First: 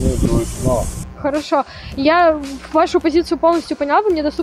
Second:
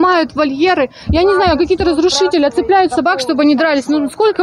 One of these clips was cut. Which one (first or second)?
first